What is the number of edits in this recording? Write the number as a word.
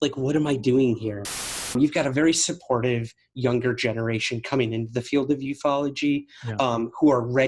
one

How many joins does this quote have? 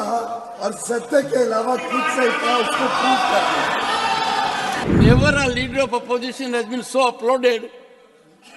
one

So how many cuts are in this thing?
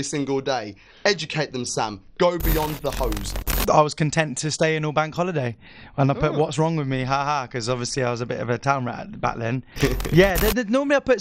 two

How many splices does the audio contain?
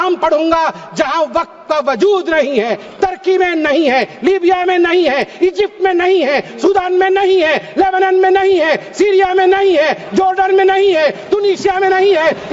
zero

